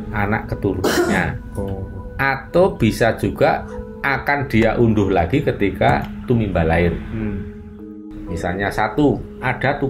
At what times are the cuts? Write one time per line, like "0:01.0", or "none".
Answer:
0:08.1